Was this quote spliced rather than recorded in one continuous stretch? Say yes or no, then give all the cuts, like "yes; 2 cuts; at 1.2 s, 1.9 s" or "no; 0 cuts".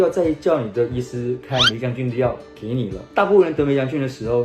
yes; 1 cut; at 3.0 s